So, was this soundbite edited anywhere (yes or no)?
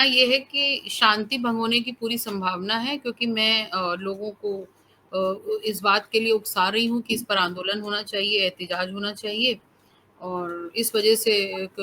no